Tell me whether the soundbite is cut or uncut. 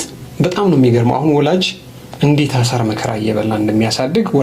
uncut